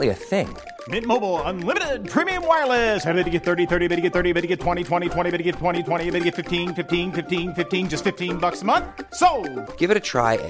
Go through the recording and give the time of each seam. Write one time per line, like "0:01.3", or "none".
none